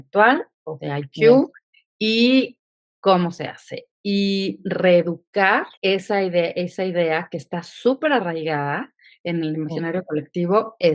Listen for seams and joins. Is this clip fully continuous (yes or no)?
no